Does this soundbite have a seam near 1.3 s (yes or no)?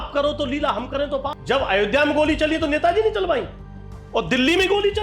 yes